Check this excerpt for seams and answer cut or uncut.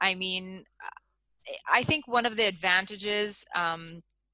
uncut